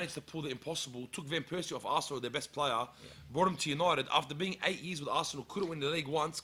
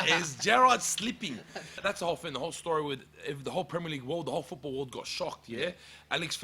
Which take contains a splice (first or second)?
second